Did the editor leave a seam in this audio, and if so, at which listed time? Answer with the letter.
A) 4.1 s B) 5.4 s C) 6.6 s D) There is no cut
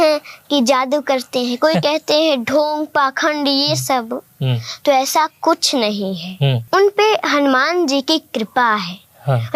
C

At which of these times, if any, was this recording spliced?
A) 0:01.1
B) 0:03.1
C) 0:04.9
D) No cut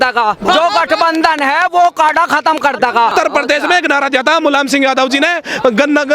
B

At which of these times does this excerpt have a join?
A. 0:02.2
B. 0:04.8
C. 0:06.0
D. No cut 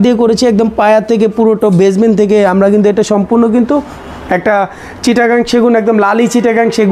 D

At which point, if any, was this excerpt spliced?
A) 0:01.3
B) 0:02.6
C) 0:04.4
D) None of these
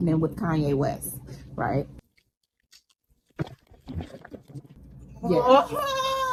D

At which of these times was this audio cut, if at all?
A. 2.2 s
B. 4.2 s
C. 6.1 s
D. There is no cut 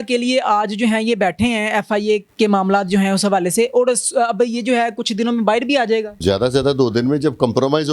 D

